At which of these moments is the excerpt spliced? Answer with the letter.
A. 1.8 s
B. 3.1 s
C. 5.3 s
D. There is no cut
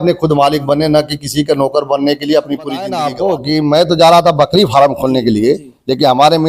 B